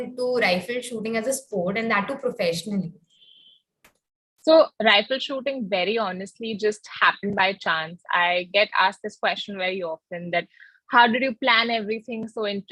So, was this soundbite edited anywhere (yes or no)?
no